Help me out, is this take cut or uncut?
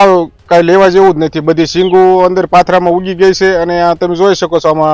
uncut